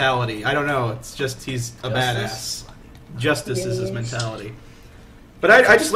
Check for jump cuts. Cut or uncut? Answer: cut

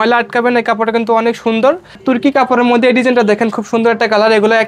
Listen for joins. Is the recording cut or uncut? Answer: cut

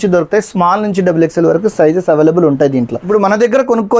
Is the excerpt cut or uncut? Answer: cut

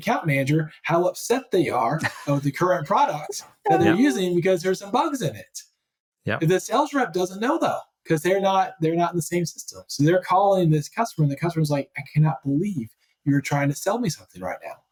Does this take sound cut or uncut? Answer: uncut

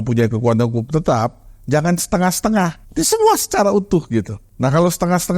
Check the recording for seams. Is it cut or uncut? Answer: cut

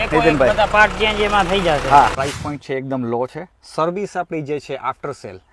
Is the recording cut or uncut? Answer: cut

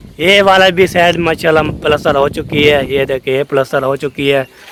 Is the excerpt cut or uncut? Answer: uncut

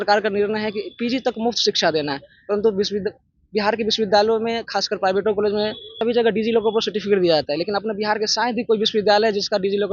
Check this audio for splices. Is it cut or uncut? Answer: cut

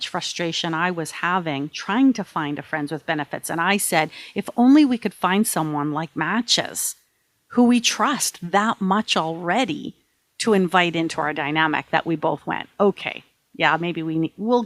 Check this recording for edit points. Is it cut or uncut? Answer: uncut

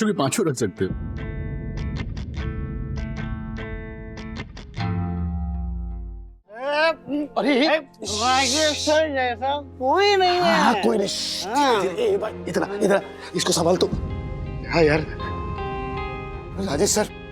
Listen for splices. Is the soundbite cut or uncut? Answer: cut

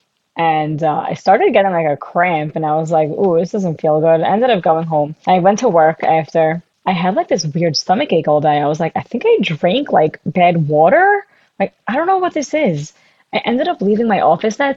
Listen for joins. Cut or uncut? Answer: cut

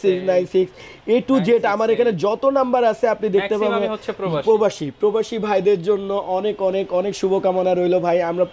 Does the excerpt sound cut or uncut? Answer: uncut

